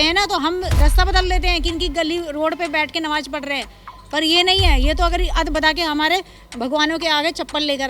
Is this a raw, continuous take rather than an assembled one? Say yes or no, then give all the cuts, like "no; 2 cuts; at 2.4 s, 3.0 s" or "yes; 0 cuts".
yes; 0 cuts